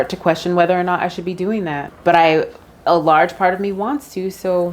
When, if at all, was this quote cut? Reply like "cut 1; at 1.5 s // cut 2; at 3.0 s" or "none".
cut 1; at 1.9 s